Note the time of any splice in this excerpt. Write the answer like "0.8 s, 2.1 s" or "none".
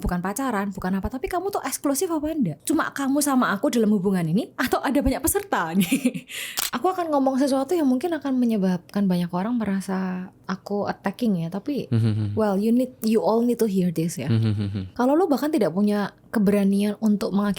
2.6 s, 6.1 s